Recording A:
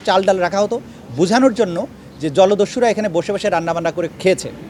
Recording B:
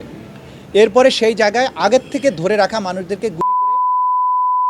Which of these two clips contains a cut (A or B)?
B